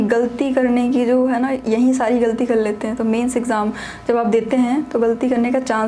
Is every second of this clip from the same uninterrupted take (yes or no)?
yes